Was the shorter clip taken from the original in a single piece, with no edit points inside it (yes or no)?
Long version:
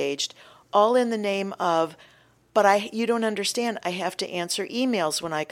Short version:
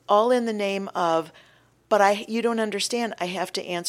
yes